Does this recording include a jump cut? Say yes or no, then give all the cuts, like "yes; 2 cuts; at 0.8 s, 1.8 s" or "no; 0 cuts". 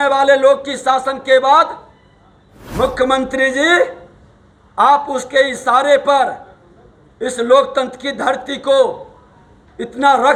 no; 0 cuts